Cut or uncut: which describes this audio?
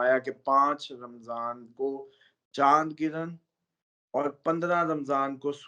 uncut